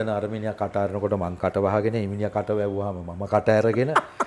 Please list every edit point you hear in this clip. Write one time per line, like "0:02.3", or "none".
none